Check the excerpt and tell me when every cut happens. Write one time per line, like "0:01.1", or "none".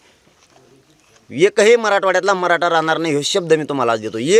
none